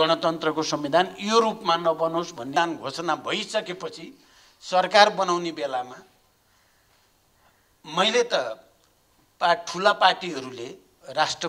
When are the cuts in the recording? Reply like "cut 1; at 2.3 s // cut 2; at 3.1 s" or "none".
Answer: cut 1; at 2.5 s